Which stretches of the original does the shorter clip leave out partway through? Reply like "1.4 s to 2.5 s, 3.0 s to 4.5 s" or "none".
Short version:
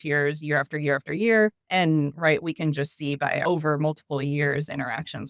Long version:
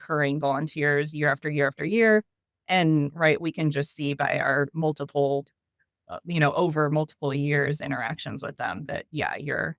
2.3 s to 2.6 s, 4.4 s to 6.5 s